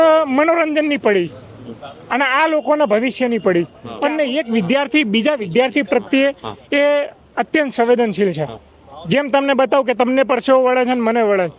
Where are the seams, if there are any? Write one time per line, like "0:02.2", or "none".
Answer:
0:03.8